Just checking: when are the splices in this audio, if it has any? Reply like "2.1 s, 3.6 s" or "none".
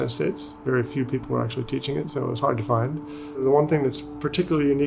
3.4 s